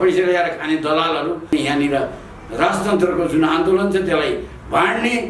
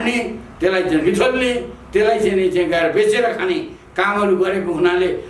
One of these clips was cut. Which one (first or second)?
first